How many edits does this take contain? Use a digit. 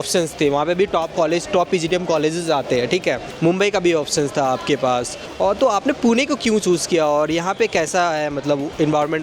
2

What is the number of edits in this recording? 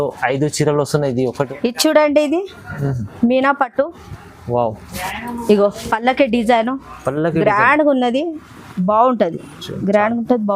1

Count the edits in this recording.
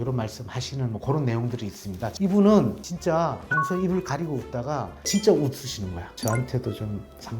1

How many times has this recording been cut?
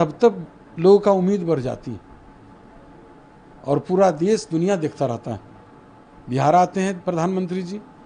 0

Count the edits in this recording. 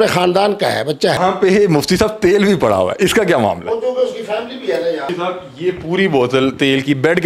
2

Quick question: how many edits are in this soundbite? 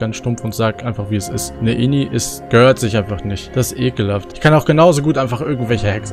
0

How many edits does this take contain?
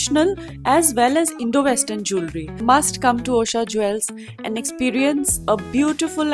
1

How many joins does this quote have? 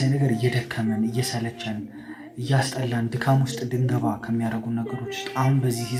0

